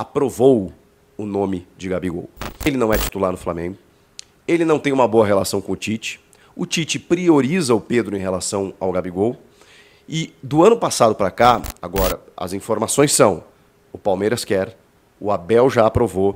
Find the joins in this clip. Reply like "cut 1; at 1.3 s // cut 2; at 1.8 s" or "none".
cut 1; at 2.7 s // cut 2; at 11.8 s

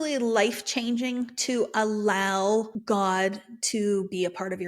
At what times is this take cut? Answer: cut 1; at 2.7 s

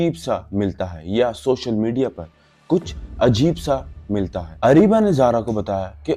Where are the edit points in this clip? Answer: cut 1; at 4.4 s

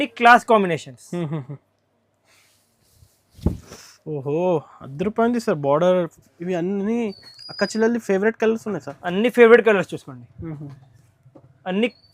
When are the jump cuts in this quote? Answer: cut 1; at 6.2 s

